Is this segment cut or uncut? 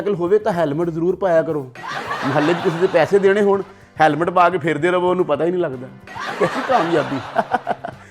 uncut